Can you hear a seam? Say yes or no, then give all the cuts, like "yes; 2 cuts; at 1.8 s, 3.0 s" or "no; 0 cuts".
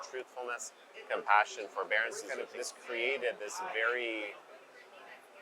yes; 1 cut; at 2.3 s